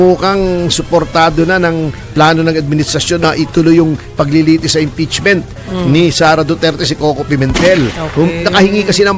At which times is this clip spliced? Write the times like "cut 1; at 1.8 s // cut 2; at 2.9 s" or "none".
cut 1; at 3.2 s